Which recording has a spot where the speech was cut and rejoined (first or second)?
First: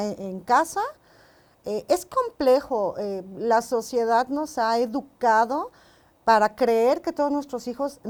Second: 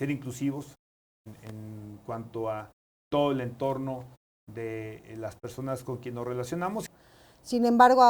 second